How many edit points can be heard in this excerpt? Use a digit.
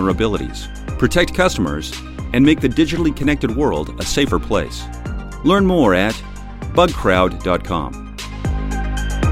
1